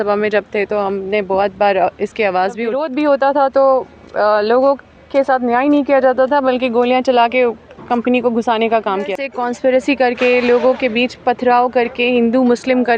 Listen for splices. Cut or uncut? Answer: cut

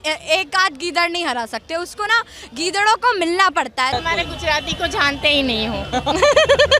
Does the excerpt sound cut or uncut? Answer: cut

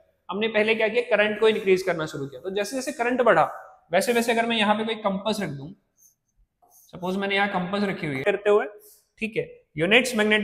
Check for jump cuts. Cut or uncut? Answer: cut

